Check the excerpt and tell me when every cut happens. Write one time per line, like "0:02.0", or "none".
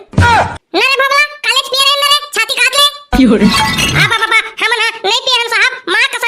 0:03.5